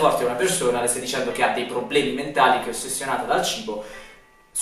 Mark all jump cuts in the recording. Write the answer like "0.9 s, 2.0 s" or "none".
none